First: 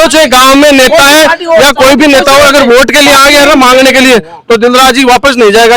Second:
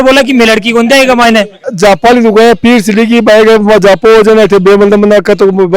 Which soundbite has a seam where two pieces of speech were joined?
second; 1 cut; at 1.7 s

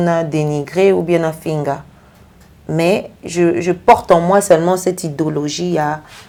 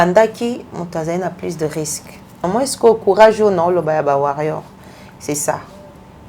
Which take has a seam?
second; 1 cut; at 2.4 s

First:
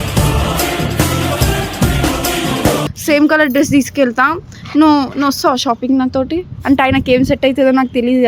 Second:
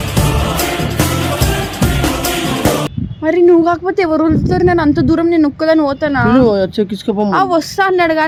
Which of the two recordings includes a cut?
first; 1 cut; at 2.9 s

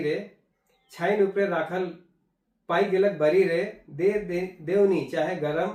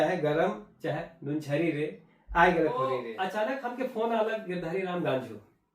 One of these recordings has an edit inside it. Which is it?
second; 1 cut; at 3.1 s

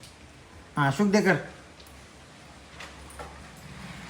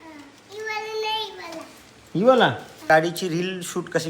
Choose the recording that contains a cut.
second; 1 cut; at 2.8 s

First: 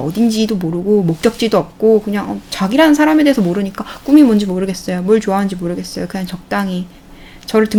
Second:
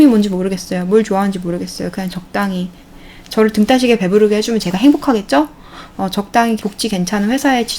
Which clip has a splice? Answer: second; 1 cut; at 6.6 s

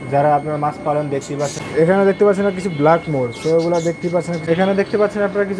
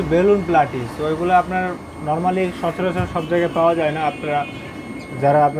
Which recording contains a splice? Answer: first; 2 cuts; at 1.6 s, 4.4 s

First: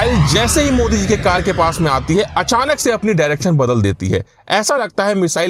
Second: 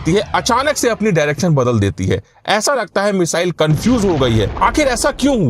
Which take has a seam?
second; 1 cut; at 4.5 s

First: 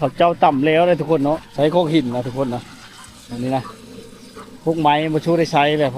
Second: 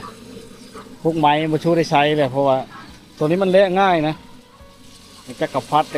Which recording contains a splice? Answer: first; 1 cut; at 1.5 s

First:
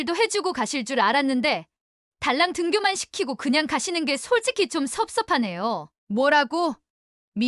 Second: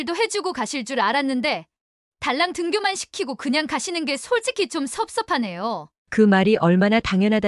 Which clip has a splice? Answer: first; 1 cut; at 5.9 s

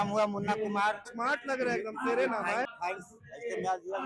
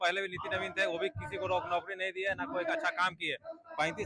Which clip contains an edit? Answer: first; 2 cuts; at 1.1 s, 2.7 s

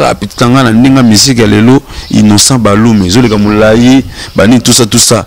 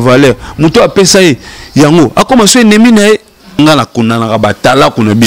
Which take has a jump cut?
second; 1 cut; at 3.6 s

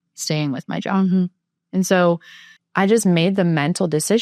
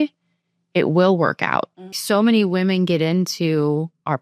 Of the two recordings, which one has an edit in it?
second; 1 cut; at 2.0 s

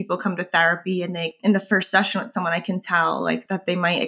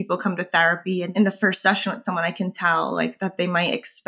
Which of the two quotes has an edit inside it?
second; 1 cut; at 1.1 s

